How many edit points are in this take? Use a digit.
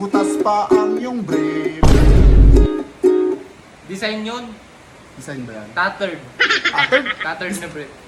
0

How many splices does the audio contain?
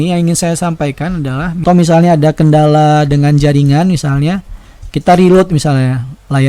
1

